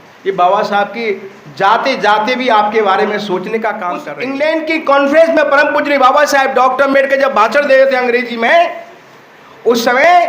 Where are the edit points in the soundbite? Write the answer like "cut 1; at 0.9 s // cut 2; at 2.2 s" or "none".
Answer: cut 1; at 4.1 s